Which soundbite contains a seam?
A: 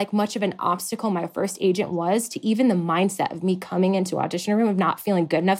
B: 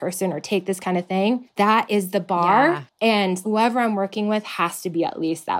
B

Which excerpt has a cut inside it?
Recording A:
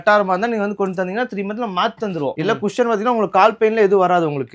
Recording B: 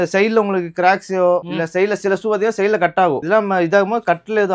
A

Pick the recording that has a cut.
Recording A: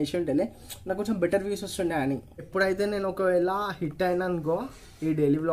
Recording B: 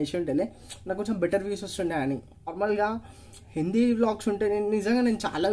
A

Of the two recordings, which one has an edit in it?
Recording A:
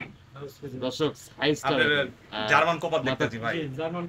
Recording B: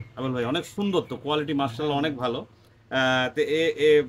A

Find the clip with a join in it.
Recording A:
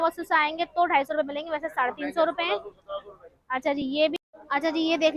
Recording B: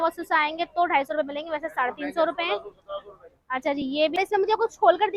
A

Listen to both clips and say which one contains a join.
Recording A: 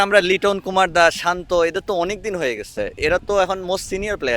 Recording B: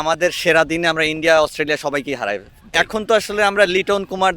B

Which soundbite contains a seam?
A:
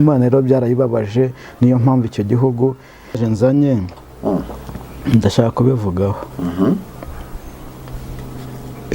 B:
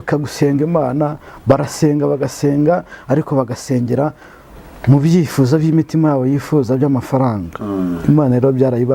A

